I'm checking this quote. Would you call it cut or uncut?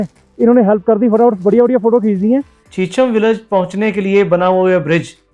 cut